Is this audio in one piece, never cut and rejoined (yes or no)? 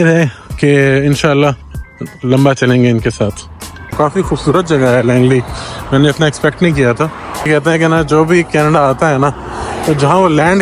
no